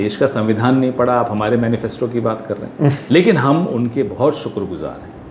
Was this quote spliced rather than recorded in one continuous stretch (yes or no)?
no